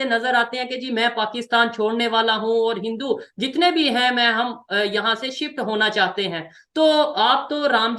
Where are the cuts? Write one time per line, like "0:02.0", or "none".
none